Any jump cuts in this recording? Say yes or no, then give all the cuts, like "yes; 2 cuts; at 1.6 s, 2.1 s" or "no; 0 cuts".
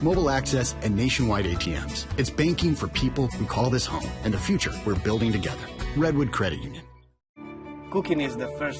no; 0 cuts